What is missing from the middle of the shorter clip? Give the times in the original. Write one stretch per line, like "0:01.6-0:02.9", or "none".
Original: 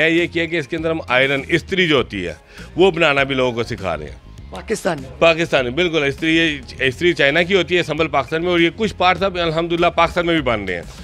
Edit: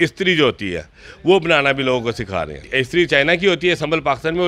0:04.1-0:06.7